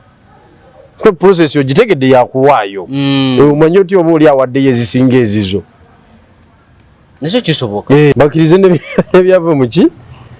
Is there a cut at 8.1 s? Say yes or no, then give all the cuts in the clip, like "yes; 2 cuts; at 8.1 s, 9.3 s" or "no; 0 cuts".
yes; 1 cut; at 8.1 s